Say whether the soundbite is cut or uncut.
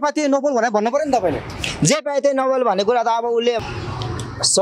cut